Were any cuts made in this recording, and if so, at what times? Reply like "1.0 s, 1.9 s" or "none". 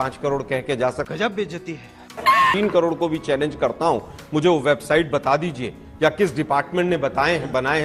none

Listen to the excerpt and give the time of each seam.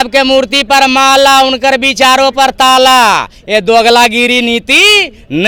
none

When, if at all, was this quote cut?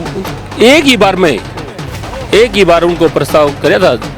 none

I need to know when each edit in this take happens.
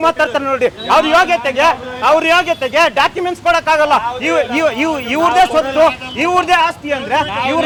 none

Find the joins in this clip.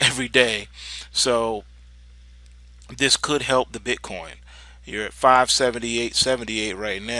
1.1 s

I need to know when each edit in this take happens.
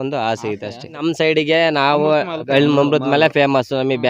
1.1 s

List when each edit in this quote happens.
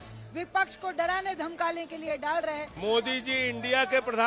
2.7 s

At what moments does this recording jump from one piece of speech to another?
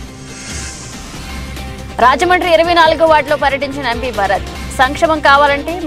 1.1 s

